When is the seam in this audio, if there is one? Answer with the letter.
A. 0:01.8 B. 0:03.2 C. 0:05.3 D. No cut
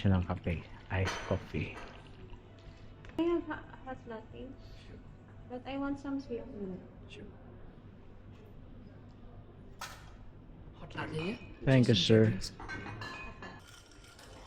B